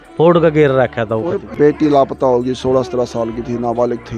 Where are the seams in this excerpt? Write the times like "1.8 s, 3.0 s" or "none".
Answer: 1.5 s